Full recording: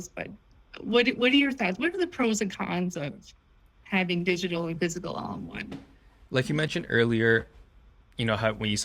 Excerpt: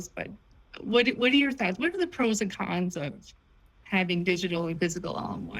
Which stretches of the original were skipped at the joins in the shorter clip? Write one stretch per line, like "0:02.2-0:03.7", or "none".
none